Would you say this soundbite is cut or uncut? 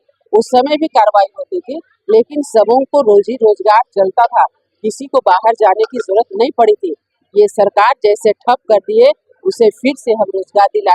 uncut